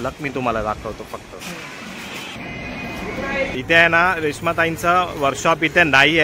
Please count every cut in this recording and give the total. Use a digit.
2